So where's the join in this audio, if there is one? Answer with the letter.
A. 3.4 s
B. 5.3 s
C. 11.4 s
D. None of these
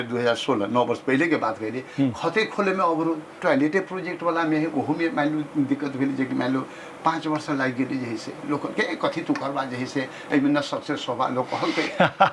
A